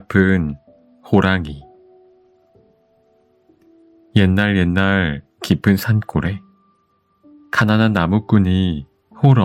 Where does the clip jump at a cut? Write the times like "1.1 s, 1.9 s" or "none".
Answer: 1.6 s, 3.5 s